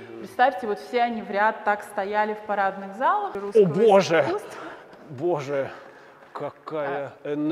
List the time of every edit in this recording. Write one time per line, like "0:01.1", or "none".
0:03.4